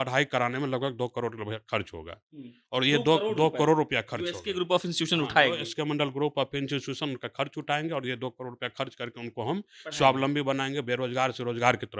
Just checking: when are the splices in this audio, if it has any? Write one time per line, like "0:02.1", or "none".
none